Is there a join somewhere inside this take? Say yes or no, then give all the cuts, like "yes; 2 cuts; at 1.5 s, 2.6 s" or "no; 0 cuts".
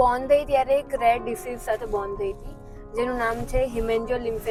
no; 0 cuts